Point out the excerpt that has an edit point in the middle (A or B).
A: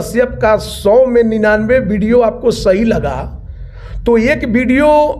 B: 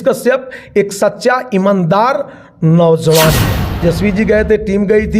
B